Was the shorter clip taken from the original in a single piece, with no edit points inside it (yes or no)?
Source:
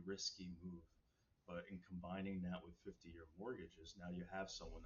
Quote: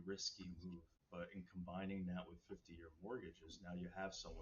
no